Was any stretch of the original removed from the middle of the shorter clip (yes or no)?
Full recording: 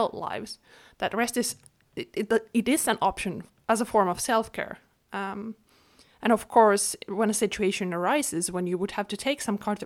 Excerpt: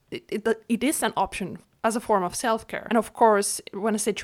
yes